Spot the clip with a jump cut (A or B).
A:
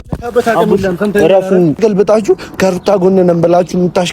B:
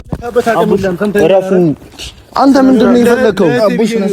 A